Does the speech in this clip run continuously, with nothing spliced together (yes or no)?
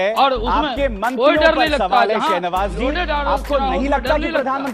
yes